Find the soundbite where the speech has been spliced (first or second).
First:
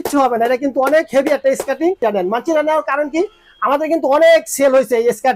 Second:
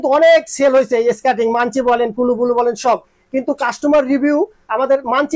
first